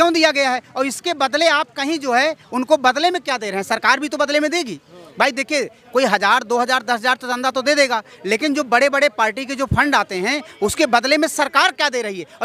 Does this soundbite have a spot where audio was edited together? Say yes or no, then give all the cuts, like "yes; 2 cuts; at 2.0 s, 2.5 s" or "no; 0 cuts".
no; 0 cuts